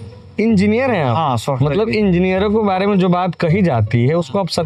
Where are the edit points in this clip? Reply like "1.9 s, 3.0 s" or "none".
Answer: none